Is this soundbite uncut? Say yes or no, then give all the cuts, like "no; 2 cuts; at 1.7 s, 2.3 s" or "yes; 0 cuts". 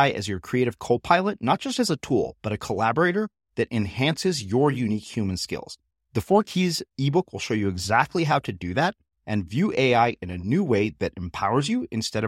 yes; 0 cuts